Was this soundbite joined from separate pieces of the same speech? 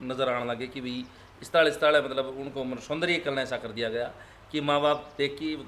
no; 0 cuts

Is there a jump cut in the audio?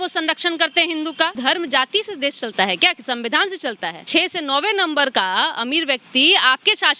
yes; 2 cuts; at 1.4 s, 4.1 s

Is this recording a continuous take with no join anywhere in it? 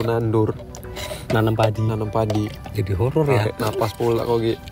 no; 1 cut; at 2.6 s

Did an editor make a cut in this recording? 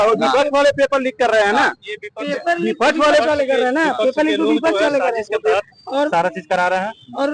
no; 0 cuts

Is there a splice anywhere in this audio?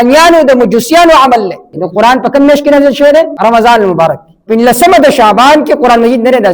yes; 3 cuts; at 1.8 s, 3.3 s, 4.3 s

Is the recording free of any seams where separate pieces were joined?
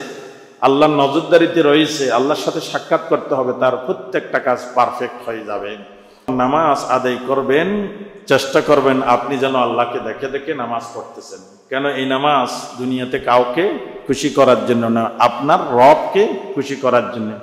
no; 1 cut; at 6.3 s

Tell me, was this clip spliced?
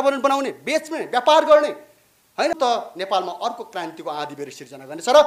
yes; 1 cut; at 2.5 s

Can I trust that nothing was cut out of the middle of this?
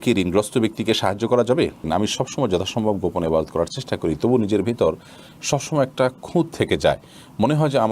no; 1 cut; at 1.9 s

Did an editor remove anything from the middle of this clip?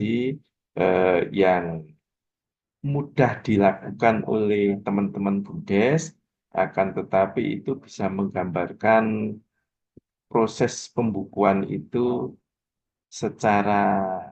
no; 0 cuts

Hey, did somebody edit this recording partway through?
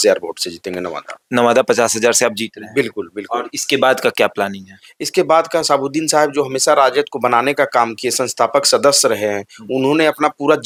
no; 0 cuts

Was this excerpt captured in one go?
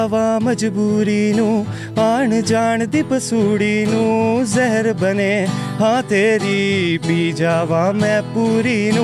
yes; 0 cuts

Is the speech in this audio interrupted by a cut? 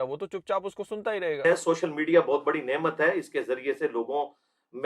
yes; 1 cut; at 1.4 s

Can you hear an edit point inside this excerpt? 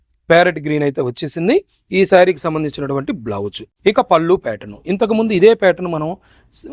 yes; 1 cut; at 3.7 s

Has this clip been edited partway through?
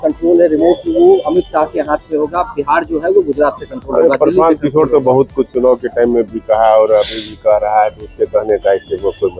no; 0 cuts

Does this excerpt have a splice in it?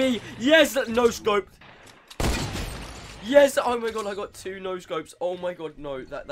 yes; 1 cut; at 1.6 s

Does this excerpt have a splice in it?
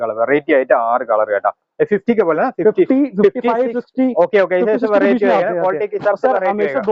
no; 0 cuts

